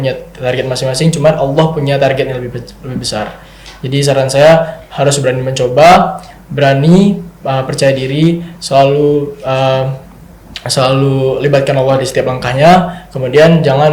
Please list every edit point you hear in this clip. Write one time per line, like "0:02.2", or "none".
none